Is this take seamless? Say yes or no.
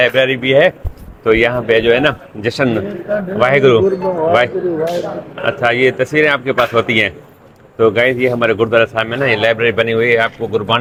yes